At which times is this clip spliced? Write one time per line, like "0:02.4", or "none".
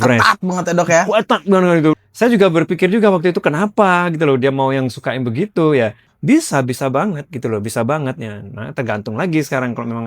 0:02.0
0:06.1